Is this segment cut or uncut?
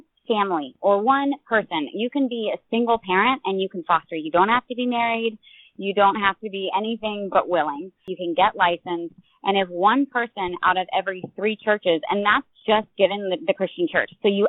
uncut